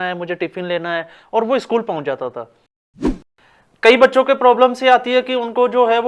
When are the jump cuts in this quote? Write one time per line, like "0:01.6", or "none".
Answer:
0:03.1